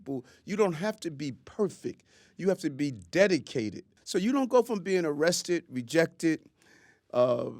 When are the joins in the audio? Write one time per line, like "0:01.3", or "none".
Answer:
0:03.9